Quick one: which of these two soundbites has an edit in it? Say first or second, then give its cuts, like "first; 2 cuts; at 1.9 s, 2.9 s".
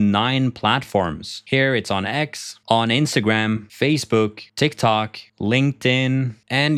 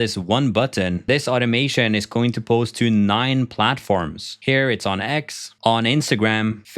second; 1 cut; at 1.1 s